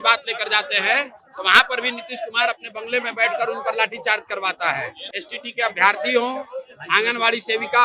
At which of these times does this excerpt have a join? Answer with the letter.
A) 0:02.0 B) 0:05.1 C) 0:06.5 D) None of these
B